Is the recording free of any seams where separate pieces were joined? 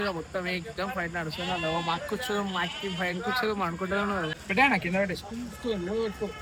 yes; 0 cuts

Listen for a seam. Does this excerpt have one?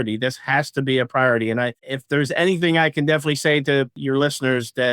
yes; 2 cuts; at 1.9 s, 4.0 s

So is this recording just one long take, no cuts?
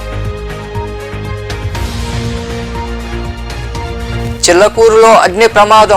no; 1 cut; at 1.6 s

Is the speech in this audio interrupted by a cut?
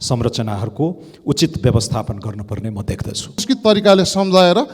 yes; 1 cut; at 3.4 s

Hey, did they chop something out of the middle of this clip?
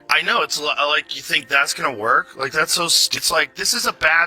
yes; 1 cut; at 3.1 s

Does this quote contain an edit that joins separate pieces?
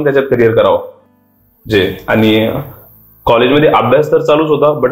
no; 0 cuts

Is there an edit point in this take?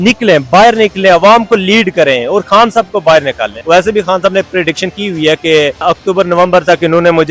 yes; 2 cuts; at 3.5 s, 5.8 s

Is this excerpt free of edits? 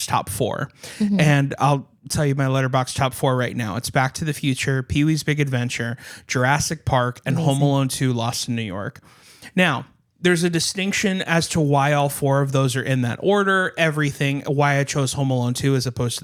yes; 0 cuts

